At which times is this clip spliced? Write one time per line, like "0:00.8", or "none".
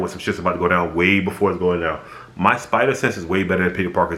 none